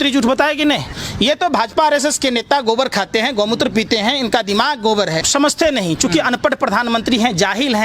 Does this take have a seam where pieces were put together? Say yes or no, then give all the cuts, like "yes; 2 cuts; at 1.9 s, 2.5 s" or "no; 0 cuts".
yes; 2 cuts; at 0.9 s, 5.2 s